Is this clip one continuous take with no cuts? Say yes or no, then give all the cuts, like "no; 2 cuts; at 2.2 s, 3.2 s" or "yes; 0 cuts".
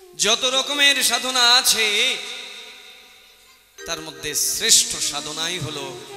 yes; 0 cuts